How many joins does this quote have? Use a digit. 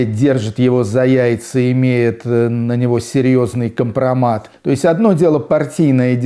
1